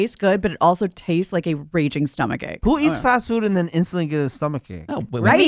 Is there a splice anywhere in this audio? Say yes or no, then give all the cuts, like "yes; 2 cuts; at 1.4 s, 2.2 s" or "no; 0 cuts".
yes; 1 cut; at 2.5 s